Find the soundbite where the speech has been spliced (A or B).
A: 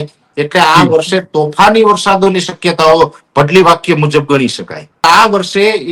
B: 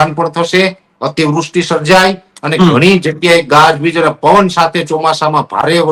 A